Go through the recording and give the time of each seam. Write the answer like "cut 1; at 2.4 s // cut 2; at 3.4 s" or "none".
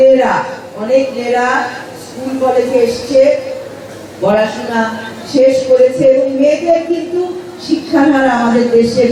none